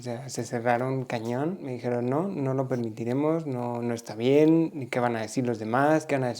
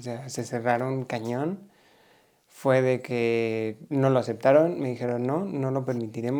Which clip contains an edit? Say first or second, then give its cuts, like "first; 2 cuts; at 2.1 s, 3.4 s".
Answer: first; 1 cut; at 1.7 s